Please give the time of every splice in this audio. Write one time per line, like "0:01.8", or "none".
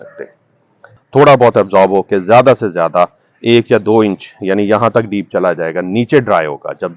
0:00.9